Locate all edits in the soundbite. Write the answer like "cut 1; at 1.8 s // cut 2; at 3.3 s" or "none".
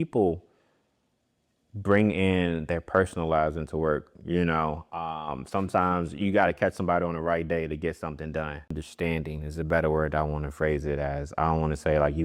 cut 1; at 8.8 s